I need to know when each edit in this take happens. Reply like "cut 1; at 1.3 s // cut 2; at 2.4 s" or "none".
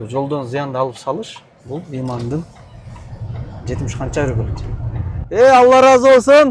none